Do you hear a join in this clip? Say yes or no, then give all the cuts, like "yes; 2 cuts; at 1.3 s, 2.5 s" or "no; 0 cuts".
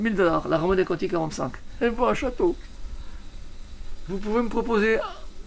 no; 0 cuts